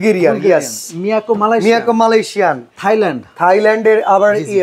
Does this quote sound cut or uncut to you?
uncut